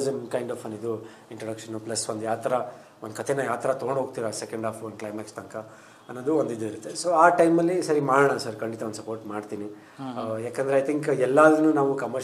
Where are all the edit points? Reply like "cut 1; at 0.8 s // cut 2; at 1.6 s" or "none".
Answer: none